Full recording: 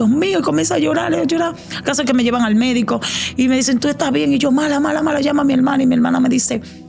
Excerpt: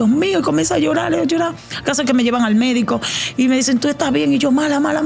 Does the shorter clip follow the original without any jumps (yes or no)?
yes